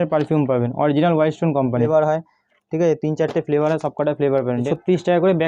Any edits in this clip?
yes; 2 cuts; at 1.9 s, 4.7 s

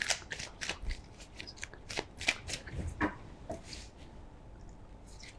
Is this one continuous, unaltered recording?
yes; 0 cuts

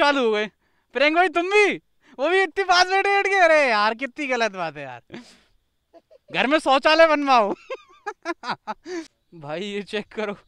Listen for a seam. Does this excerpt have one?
yes; 1 cut; at 9.2 s

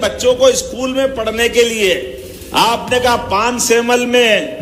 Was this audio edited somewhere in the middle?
no; 0 cuts

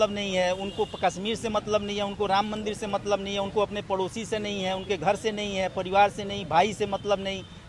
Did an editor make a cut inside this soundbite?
no; 0 cuts

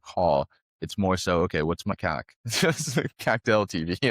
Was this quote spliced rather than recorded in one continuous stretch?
yes; 1 cut; at 1.9 s

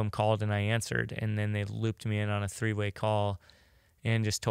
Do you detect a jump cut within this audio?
no; 0 cuts

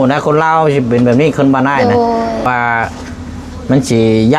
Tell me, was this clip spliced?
yes; 1 cut; at 2.5 s

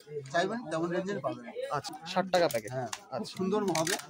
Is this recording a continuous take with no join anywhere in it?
no; 1 cut; at 2.0 s

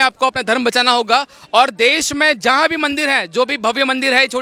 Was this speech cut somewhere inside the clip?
no; 0 cuts

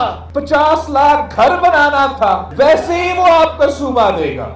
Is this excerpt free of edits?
yes; 0 cuts

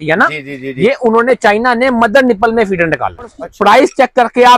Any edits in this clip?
yes; 1 cut; at 3.4 s

